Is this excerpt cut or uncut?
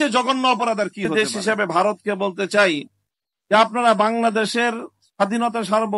cut